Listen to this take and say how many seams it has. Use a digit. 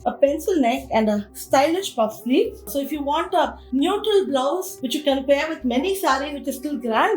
1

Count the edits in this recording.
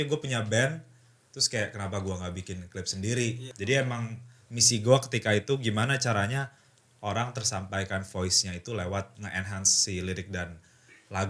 2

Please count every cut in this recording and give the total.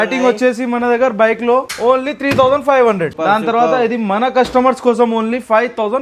2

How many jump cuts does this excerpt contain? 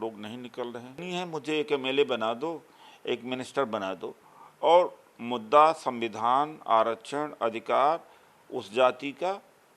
1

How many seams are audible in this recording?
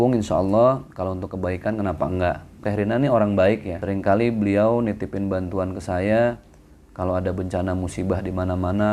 2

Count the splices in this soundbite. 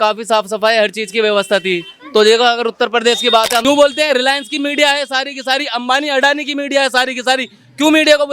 1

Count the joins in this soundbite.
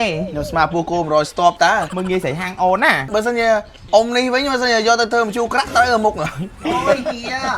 2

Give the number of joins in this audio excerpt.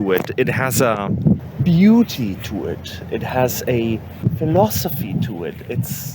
2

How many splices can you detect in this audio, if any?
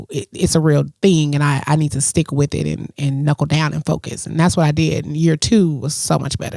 0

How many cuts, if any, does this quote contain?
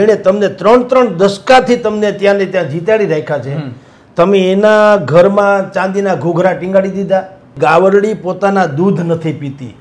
1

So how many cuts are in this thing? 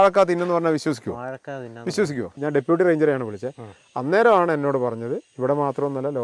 1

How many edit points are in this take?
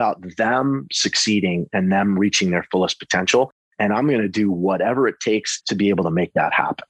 1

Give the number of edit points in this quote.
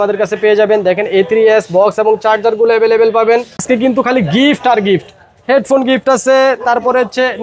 1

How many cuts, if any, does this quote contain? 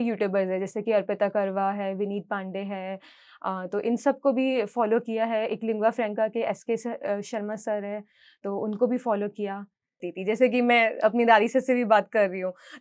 1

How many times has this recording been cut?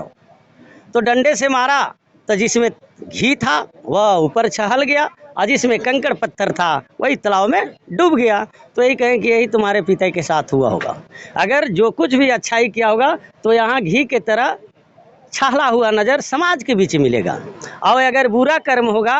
0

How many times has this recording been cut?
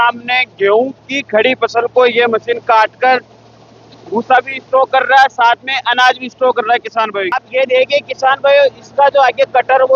1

